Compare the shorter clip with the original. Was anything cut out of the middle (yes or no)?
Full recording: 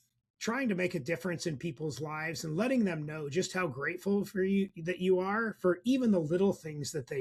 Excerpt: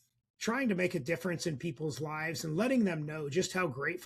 no